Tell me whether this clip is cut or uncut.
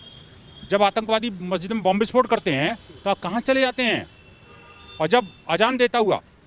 uncut